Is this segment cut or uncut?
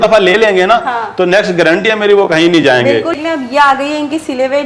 cut